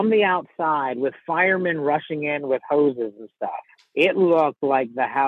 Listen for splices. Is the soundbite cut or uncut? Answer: uncut